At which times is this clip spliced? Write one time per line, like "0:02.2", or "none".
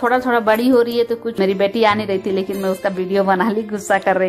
0:01.4